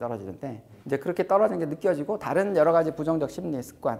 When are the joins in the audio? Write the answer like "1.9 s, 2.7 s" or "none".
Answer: none